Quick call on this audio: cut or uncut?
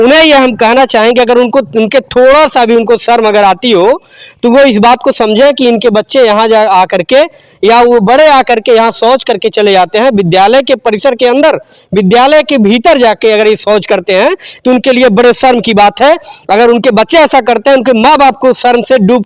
uncut